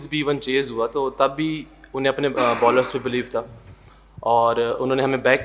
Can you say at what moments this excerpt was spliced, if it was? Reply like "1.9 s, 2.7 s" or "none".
none